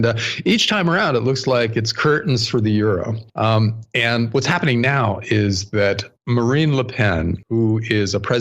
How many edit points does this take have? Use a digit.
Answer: 1